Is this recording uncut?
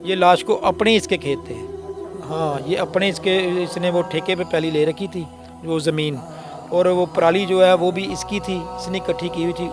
yes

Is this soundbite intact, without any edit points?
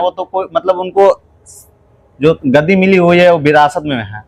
yes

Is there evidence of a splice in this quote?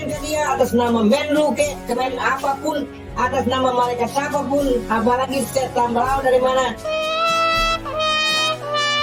no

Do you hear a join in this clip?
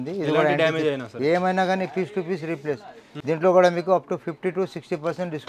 yes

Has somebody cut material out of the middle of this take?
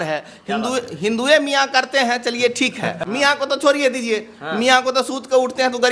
yes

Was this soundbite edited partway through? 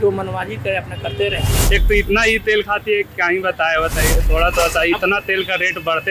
yes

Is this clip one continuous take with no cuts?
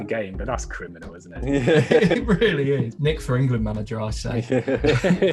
no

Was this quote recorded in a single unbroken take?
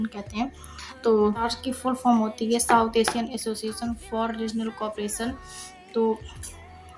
no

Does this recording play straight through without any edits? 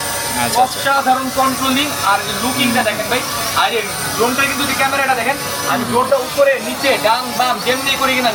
yes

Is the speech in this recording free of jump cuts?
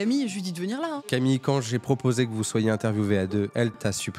no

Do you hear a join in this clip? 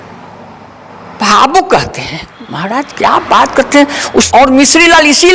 yes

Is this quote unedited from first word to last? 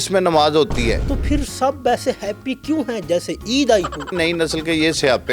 no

